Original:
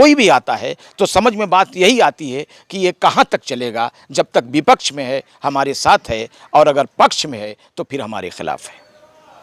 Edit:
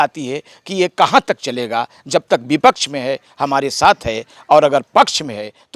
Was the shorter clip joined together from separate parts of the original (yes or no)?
no